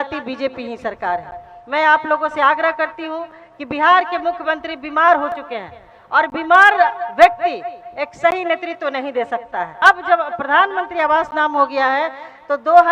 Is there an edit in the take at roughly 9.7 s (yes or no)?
yes